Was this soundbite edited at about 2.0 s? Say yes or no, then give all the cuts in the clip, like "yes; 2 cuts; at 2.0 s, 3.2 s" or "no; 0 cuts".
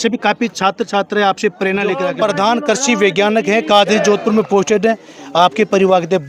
yes; 1 cut; at 2.0 s